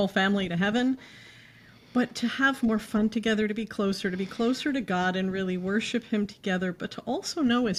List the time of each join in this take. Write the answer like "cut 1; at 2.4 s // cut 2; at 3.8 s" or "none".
none

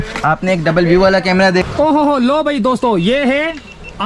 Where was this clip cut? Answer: cut 1; at 1.6 s

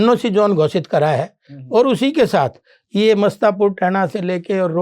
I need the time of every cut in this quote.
none

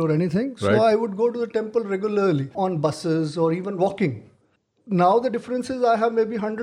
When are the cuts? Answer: cut 1; at 2.5 s

